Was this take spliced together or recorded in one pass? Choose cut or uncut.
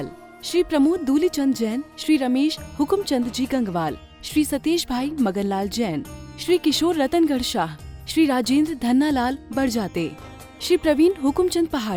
uncut